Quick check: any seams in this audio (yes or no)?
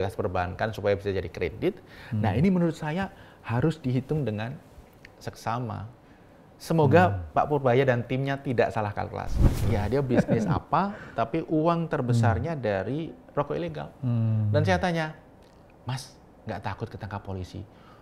yes